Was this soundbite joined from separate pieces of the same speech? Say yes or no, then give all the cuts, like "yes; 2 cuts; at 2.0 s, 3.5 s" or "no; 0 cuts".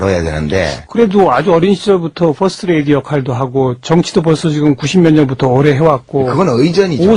no; 0 cuts